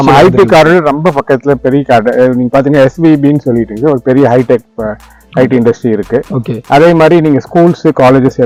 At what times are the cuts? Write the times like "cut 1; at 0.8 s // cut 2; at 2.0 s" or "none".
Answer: none